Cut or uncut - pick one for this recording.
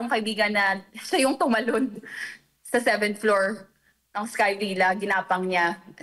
uncut